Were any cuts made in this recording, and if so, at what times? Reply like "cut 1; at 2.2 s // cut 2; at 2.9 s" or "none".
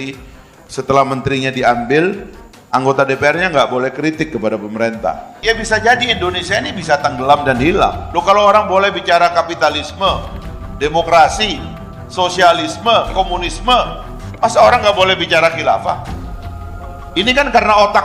cut 1; at 5.3 s // cut 2; at 8.0 s